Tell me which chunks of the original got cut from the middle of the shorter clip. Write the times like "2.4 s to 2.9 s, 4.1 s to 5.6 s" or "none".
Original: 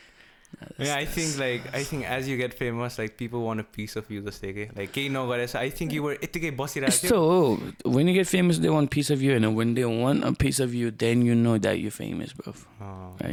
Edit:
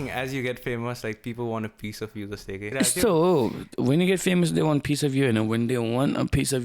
4.6 s to 6.8 s